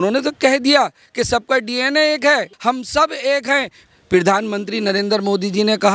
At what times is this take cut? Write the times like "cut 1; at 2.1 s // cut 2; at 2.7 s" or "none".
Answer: cut 1; at 2.5 s // cut 2; at 3.8 s